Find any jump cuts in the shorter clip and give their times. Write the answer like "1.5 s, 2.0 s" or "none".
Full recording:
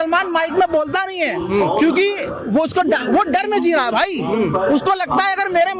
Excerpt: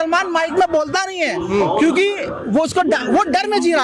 none